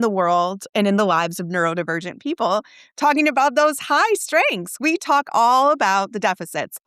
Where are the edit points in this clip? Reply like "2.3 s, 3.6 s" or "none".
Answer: none